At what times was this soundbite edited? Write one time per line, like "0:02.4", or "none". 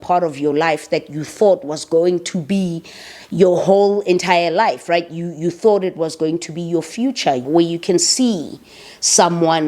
0:07.4